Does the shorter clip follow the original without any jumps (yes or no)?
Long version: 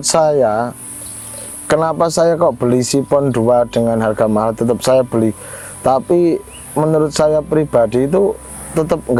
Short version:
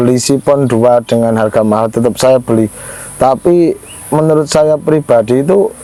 yes